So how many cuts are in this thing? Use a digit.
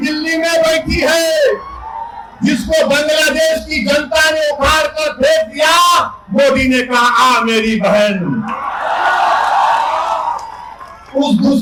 0